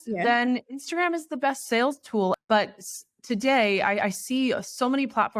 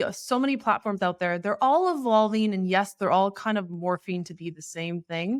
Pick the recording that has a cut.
first; 1 cut; at 2.4 s

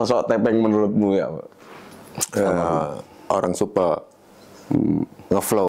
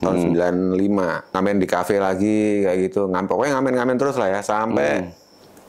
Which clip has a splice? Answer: second; 1 cut; at 1.4 s

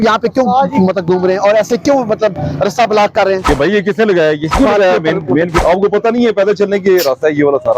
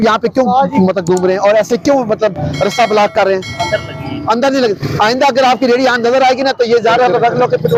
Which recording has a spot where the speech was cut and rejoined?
first; 3 cuts; at 3.5 s, 4.5 s, 5.6 s

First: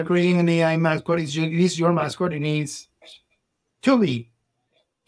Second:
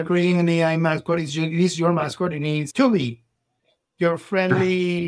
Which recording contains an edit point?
second; 1 cut; at 2.7 s

